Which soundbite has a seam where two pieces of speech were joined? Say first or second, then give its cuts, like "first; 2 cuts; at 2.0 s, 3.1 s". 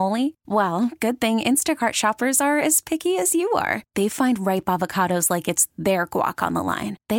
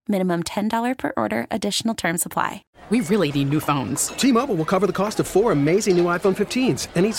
second; 1 cut; at 2.7 s